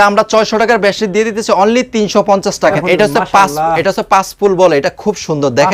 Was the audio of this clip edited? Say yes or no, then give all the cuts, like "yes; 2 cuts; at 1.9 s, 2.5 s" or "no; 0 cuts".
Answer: yes; 1 cut; at 2.7 s